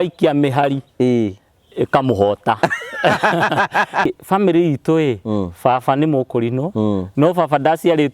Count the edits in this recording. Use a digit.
1